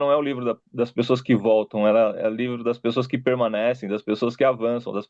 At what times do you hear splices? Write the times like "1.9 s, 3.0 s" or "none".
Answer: none